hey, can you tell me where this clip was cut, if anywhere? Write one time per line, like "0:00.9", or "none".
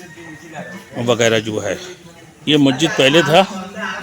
0:02.4